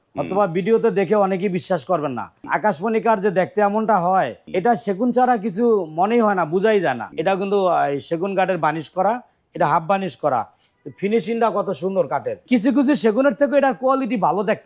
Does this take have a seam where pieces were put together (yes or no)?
yes